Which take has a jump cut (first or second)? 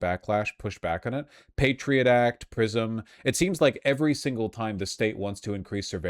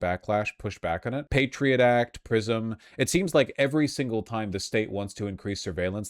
second